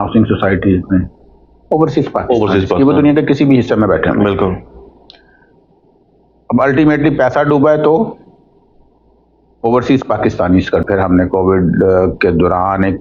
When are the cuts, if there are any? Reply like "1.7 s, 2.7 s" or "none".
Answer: 10.8 s

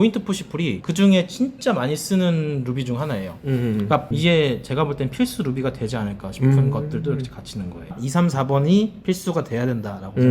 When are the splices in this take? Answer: 4.1 s, 7.9 s

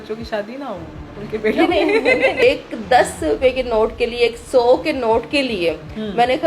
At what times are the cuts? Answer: 2.4 s

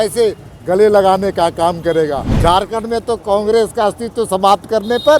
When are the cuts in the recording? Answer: 2.3 s

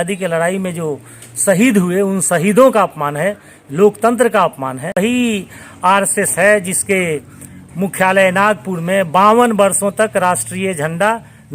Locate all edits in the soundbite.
5.0 s

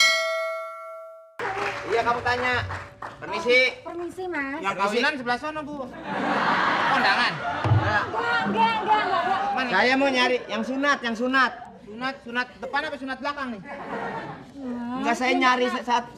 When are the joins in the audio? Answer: 1.4 s

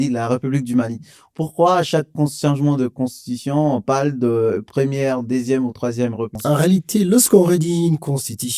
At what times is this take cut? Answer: 6.3 s

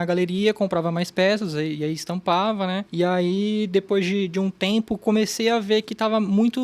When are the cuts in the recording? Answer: 2.9 s

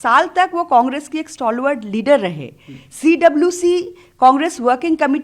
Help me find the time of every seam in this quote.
none

